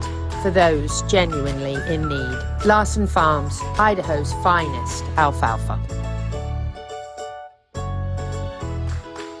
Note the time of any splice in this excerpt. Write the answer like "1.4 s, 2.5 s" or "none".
none